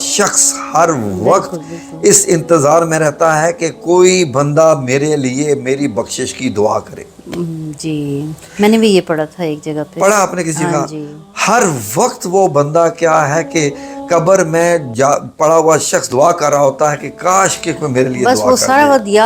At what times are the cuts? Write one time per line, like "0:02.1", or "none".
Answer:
none